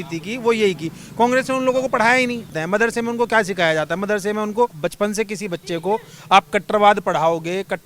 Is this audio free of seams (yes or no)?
no